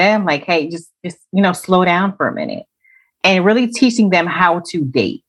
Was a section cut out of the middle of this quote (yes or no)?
no